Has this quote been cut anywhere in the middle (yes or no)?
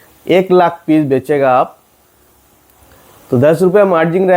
no